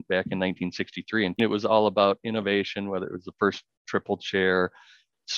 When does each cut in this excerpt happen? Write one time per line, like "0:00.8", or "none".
0:01.4

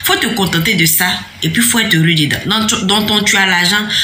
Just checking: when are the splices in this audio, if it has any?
0:01.3
0:02.7

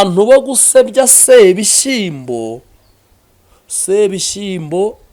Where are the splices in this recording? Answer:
none

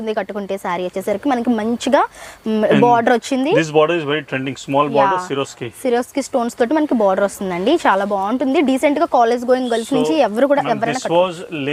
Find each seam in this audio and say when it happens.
none

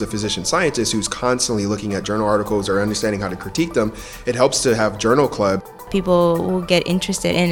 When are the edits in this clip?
0:05.8

